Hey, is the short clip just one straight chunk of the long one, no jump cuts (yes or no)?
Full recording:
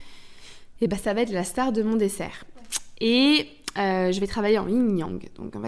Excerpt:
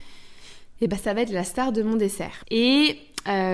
no